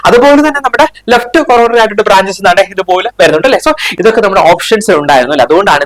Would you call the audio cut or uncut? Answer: cut